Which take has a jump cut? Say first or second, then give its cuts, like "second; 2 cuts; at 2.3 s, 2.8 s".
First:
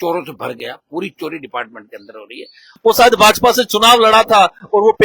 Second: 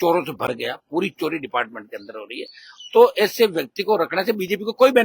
first; 1 cut; at 2.7 s